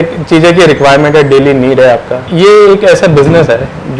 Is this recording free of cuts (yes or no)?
no